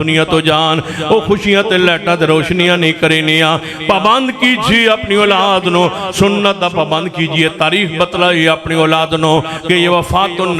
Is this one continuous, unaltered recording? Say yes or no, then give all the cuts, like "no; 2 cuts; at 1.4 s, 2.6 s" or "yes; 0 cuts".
yes; 0 cuts